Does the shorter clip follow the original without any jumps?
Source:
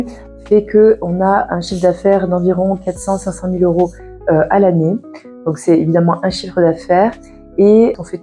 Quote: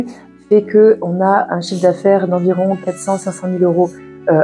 yes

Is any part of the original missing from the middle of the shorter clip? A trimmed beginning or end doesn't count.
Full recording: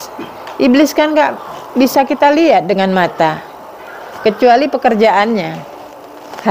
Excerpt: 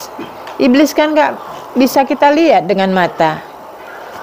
no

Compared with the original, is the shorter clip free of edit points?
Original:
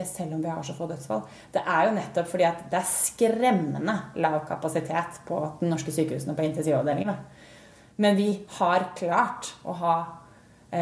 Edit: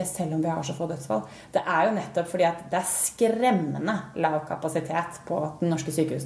yes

